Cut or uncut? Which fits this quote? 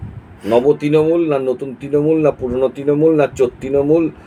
uncut